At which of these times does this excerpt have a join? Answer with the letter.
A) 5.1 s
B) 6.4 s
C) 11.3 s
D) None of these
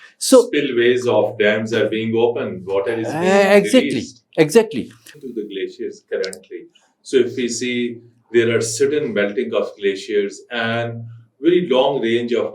A